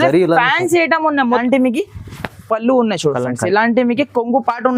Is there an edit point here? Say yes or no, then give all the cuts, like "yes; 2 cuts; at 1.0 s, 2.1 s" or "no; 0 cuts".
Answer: yes; 1 cut; at 1.3 s